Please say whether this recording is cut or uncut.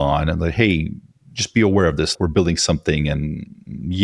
cut